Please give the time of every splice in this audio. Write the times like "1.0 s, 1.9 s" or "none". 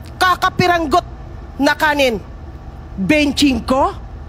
2.1 s